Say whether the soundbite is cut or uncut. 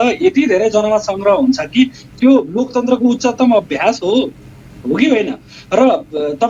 uncut